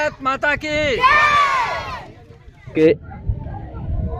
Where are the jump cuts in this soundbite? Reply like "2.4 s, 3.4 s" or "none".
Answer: 2.7 s